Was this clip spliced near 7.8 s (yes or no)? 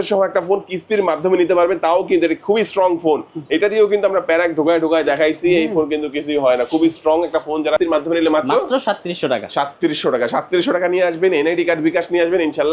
yes